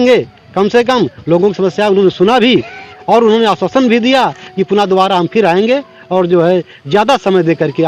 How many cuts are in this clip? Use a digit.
0